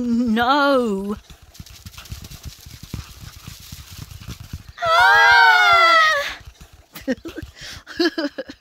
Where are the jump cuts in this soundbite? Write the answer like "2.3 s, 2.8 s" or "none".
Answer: none